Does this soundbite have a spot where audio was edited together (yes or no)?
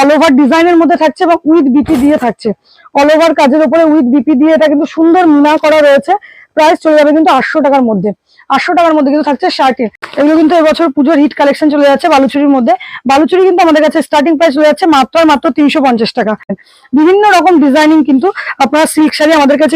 yes